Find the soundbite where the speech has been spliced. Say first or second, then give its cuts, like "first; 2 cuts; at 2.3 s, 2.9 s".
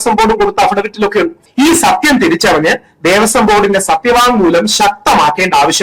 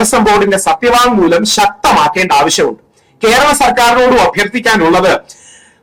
first; 1 cut; at 1.4 s